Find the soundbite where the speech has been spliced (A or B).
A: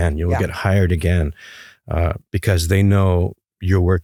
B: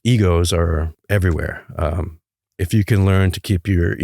B